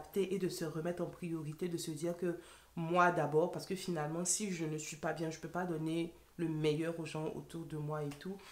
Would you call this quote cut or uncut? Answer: uncut